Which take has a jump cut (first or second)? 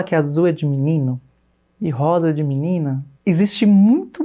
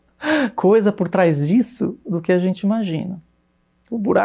first